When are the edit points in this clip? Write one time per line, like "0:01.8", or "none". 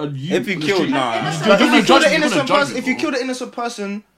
none